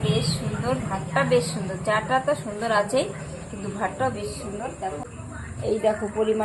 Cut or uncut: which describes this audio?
uncut